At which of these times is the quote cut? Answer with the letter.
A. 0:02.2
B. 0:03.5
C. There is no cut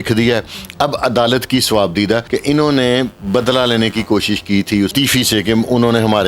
A